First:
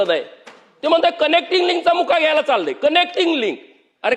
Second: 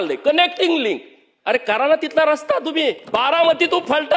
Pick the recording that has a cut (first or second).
second